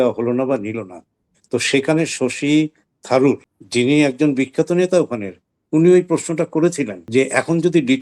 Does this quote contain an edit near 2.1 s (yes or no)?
no